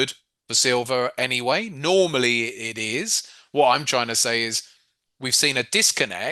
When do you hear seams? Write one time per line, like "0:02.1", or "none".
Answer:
none